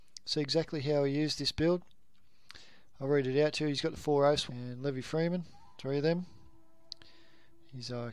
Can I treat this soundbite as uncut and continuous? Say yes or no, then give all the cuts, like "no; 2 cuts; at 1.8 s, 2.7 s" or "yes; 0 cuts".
yes; 0 cuts